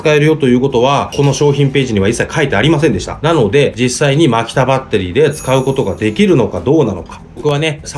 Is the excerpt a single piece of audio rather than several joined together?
yes; 0 cuts

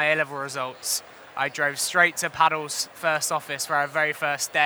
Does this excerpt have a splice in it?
no; 0 cuts

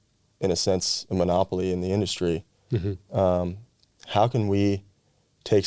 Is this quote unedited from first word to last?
yes; 0 cuts

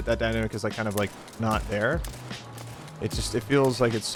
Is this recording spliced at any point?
no; 0 cuts

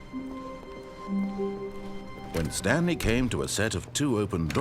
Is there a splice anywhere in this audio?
yes; 1 cut; at 2.3 s

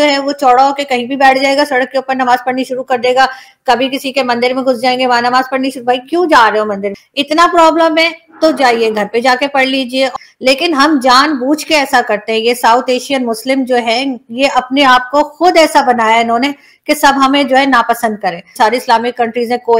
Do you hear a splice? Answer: no; 0 cuts

